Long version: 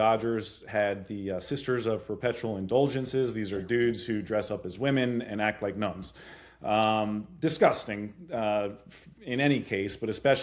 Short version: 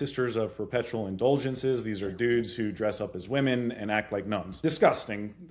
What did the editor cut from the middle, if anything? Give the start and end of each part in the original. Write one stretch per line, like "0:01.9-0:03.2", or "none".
0:06.0-0:07.3